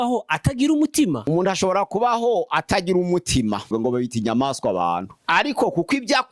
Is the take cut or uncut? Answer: cut